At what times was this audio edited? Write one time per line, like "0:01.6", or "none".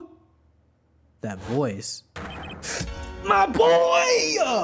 none

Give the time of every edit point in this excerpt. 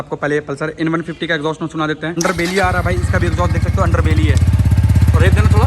0:02.2

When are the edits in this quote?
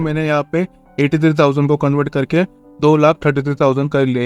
none

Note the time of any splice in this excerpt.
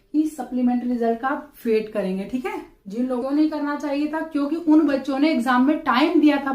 0:03.2

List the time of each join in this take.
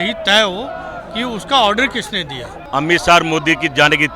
0:02.6

